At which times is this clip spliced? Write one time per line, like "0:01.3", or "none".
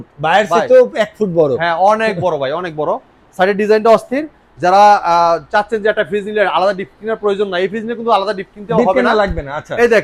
none